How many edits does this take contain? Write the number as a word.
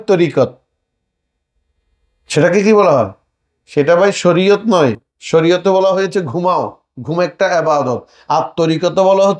zero